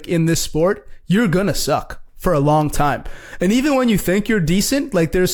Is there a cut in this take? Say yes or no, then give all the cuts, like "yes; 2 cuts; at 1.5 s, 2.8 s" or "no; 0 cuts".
no; 0 cuts